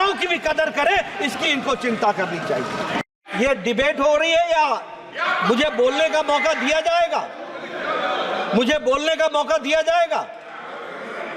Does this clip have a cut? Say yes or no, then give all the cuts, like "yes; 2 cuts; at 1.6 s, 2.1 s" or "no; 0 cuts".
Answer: yes; 1 cut; at 3.1 s